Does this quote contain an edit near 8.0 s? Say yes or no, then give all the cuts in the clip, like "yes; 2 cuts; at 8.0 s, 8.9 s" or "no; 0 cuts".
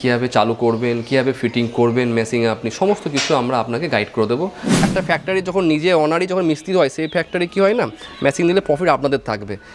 no; 1 cut; at 4.8 s